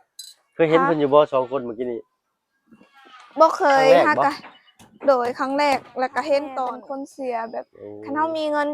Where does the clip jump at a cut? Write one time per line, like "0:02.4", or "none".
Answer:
0:06.8